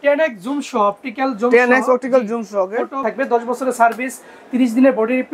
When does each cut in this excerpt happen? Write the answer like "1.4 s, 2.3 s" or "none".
3.0 s